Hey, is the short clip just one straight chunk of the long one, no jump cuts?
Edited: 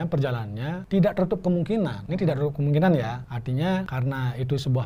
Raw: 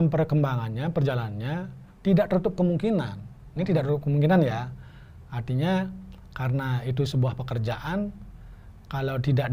no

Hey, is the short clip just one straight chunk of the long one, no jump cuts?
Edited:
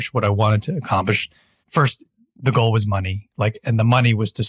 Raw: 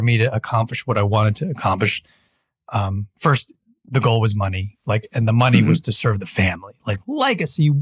no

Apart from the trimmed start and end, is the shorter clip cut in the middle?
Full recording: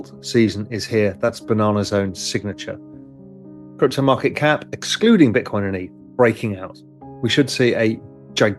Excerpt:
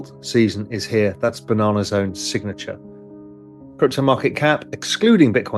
no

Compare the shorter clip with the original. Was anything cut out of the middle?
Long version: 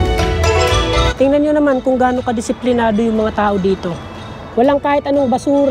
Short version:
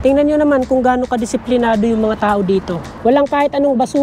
yes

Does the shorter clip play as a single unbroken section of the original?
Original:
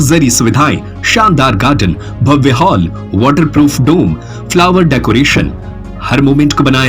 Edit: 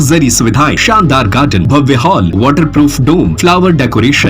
no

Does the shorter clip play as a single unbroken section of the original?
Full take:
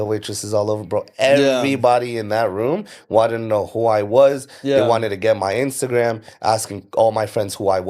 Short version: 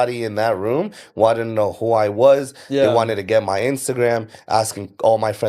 yes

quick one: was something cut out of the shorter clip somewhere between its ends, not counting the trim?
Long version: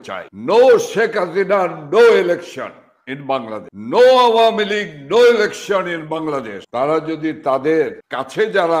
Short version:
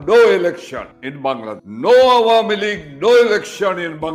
yes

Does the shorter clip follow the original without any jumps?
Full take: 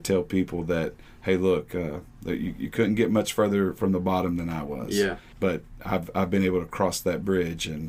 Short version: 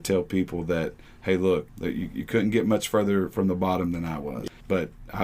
no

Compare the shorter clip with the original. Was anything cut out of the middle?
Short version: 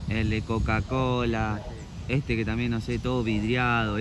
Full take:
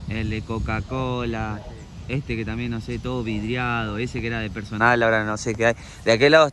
no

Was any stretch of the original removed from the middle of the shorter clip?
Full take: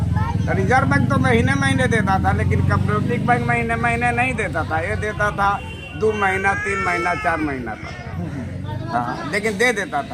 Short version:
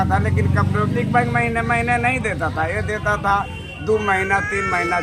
no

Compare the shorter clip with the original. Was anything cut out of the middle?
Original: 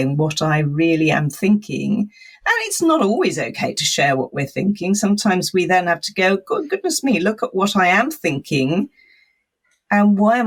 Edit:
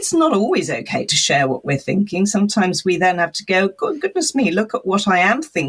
no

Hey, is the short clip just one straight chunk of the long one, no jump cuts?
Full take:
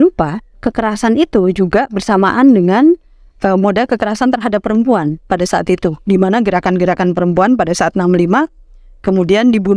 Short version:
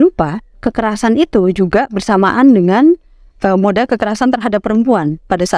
yes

